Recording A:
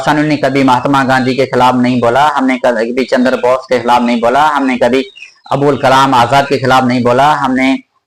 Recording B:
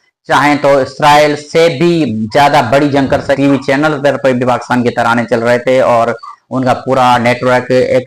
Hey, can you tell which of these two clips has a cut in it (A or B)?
B